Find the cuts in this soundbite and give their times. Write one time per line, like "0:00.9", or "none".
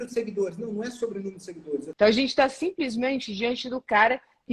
0:01.9